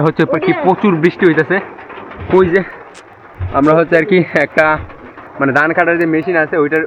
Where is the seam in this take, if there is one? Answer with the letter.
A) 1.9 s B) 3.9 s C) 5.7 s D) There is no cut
D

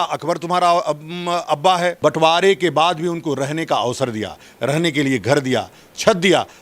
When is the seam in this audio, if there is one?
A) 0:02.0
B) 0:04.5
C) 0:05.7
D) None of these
A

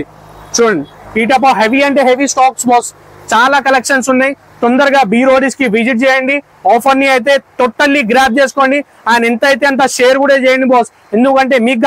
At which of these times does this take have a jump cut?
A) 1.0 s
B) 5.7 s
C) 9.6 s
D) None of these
D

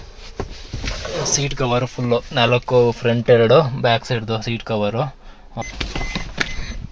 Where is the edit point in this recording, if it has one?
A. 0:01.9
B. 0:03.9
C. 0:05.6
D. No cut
C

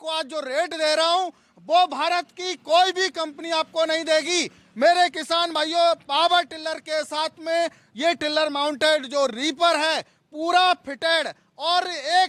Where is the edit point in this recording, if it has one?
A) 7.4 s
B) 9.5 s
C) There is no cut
C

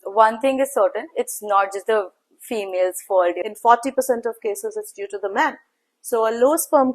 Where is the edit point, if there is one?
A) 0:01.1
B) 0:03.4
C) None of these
B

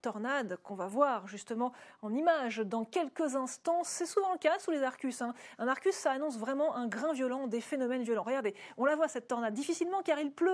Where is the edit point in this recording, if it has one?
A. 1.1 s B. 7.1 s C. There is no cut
B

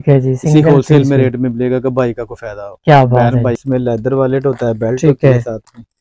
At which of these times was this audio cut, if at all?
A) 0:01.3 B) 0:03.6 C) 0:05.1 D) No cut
B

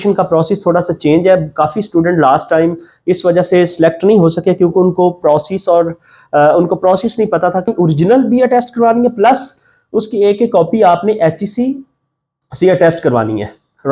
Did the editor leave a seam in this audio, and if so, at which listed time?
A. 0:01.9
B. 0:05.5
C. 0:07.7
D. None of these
C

